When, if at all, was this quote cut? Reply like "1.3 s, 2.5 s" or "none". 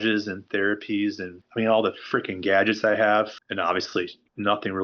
3.4 s